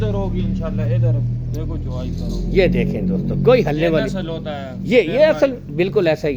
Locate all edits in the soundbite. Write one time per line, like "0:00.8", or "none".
none